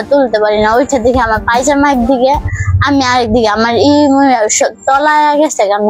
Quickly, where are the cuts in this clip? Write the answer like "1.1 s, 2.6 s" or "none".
none